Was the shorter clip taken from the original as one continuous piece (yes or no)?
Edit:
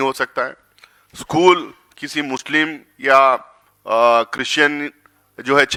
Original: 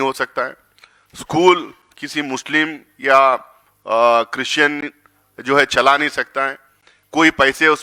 yes